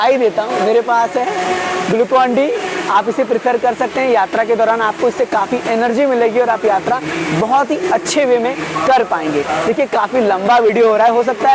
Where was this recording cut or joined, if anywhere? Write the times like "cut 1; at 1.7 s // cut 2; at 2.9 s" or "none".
none